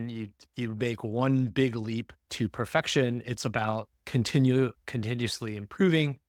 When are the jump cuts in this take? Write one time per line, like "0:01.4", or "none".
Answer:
none